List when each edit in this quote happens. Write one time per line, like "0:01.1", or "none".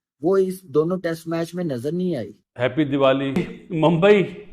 0:02.4
0:03.4